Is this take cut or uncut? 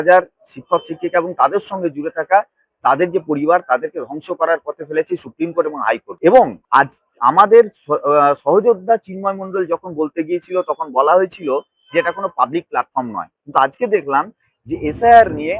cut